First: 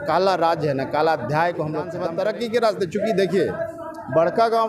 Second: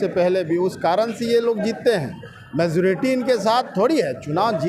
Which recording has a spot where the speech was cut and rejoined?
first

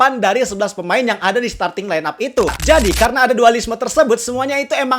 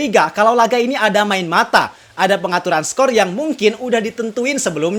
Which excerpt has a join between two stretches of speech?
first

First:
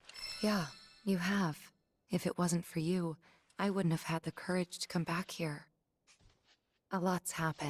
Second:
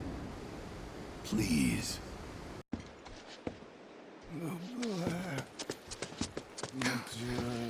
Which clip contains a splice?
second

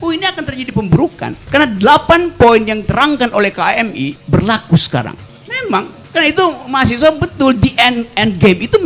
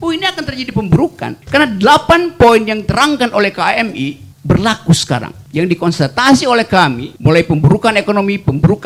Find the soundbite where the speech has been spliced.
first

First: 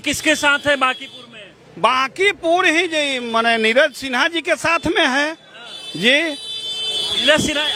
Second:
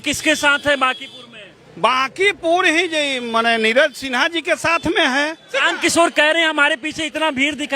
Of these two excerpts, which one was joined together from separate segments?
second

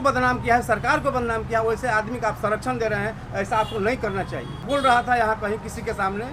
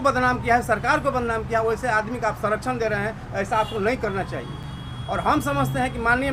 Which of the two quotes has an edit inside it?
first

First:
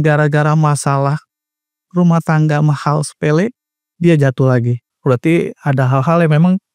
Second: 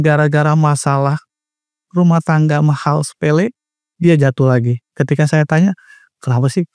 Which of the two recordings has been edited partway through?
first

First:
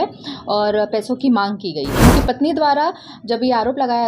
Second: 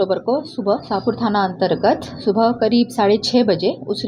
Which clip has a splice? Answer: first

